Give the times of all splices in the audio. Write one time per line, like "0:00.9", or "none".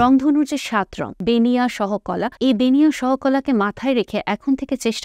0:01.0
0:02.3